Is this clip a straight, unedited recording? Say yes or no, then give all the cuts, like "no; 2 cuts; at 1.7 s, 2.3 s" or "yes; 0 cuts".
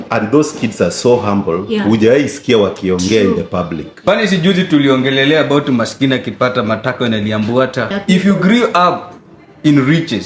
no; 2 cuts; at 4.0 s, 7.9 s